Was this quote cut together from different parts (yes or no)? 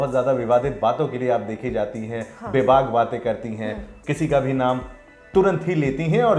no